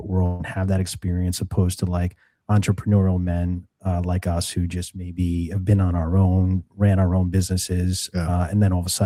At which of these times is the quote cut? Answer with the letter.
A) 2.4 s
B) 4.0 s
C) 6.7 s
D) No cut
D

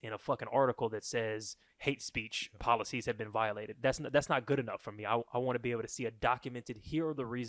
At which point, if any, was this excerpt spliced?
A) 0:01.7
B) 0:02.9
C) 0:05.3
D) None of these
A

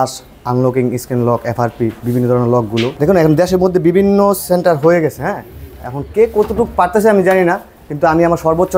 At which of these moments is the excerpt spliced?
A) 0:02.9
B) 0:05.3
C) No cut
A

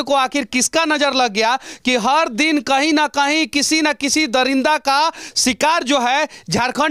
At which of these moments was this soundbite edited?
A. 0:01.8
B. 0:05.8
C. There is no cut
C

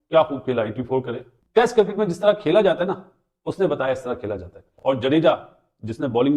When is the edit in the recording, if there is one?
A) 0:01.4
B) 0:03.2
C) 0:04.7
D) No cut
C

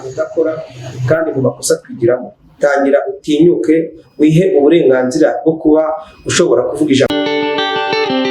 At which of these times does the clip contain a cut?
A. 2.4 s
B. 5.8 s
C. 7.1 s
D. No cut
C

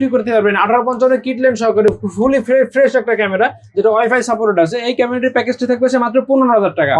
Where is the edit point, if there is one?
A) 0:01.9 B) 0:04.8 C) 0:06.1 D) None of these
D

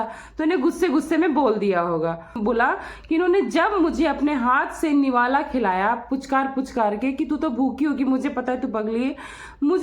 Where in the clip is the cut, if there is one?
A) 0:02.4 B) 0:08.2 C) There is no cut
A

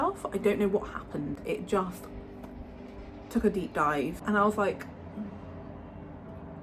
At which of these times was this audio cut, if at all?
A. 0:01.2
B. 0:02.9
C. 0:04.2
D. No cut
C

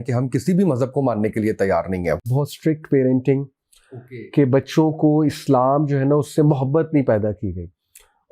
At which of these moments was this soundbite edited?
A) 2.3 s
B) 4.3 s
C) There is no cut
A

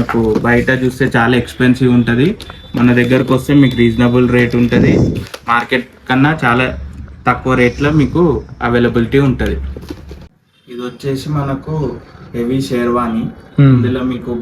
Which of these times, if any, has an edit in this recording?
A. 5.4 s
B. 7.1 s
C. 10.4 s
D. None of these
C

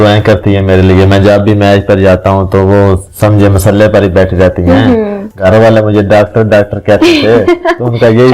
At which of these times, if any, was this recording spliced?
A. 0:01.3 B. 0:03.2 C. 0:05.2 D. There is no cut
C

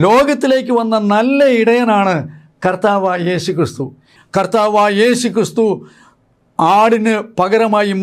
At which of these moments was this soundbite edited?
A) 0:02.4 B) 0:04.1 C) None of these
B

